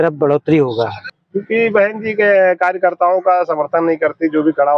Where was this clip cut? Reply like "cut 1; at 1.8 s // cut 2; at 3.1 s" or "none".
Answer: cut 1; at 1.0 s